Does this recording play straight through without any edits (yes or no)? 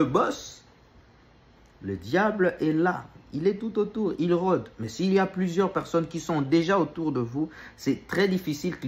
yes